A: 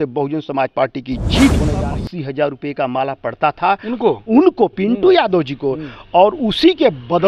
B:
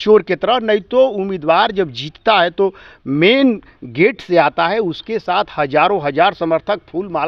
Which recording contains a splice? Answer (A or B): A